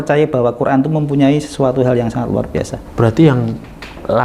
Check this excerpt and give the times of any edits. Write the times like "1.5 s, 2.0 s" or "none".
2.9 s